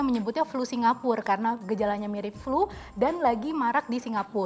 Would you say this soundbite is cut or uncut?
uncut